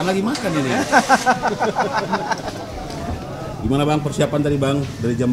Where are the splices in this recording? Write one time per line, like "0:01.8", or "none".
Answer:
0:03.2